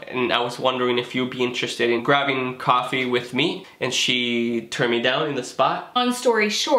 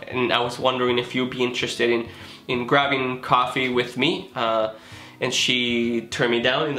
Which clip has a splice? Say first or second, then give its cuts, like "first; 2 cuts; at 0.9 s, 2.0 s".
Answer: first; 3 cuts; at 2.0 s, 3.6 s, 6.0 s